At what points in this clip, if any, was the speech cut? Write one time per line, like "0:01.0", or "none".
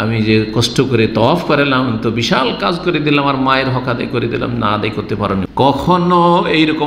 0:05.4